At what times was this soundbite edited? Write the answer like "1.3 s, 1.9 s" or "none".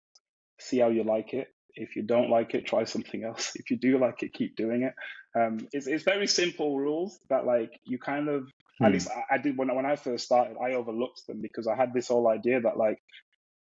none